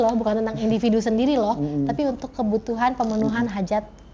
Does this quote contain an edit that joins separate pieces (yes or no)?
no